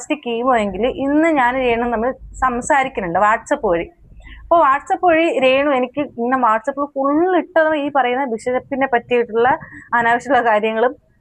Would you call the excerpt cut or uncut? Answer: uncut